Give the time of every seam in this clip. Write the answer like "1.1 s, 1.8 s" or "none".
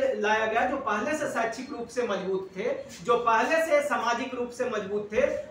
none